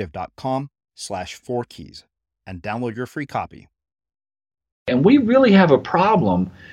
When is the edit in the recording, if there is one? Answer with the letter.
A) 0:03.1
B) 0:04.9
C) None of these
B